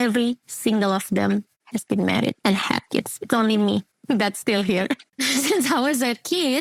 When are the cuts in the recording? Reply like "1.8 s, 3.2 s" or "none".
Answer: none